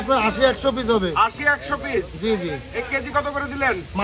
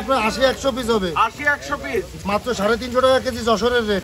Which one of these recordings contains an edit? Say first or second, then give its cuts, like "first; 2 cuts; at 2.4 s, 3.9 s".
second; 1 cut; at 2.1 s